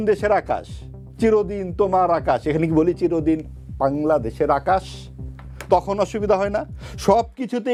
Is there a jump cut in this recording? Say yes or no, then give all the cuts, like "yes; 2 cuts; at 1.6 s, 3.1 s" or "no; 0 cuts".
no; 0 cuts